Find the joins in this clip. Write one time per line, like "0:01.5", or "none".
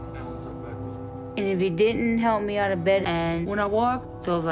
none